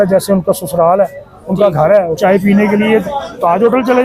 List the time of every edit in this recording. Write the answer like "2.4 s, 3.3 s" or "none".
2.2 s